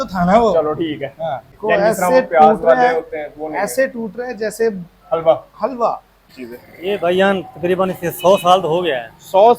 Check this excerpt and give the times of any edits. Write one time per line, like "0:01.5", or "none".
0:01.5
0:06.4